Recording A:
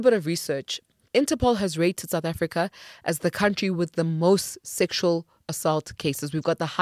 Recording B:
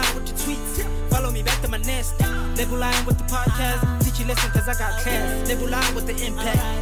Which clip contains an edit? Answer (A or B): A